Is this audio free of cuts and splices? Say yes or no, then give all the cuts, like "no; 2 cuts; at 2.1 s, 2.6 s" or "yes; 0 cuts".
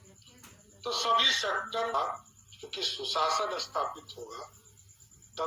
no; 1 cut; at 1.9 s